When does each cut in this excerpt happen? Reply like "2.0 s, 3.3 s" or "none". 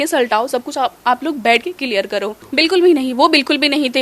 2.4 s